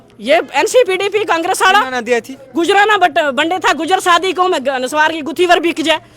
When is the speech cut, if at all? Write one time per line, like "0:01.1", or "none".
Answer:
none